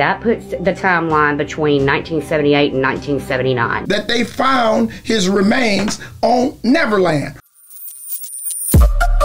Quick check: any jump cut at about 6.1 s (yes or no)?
no